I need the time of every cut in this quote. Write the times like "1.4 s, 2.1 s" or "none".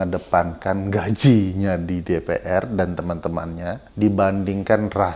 3.8 s